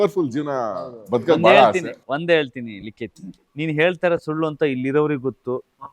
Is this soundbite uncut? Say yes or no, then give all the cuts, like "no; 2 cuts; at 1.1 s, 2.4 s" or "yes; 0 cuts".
yes; 0 cuts